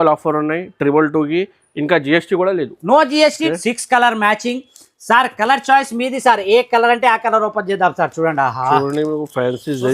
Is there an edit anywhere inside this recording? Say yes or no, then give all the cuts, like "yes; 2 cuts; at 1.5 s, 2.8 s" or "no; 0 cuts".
yes; 1 cut; at 3.4 s